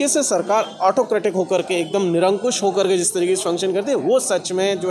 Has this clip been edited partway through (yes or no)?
no